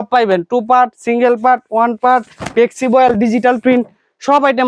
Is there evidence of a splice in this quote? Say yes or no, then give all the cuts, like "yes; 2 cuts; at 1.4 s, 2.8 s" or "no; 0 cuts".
no; 0 cuts